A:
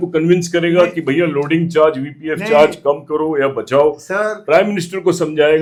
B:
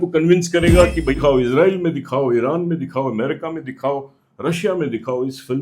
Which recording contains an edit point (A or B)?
B